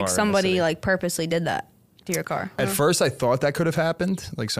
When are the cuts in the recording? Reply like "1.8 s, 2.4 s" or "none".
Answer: 2.6 s